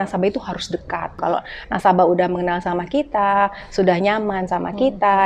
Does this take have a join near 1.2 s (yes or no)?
yes